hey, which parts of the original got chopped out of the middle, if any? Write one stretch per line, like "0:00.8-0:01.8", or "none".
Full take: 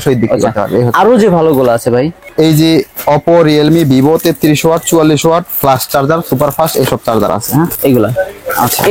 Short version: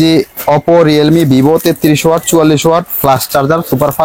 none